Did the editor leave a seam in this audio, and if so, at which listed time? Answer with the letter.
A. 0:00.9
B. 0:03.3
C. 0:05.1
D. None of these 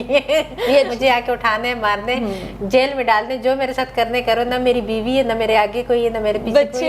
A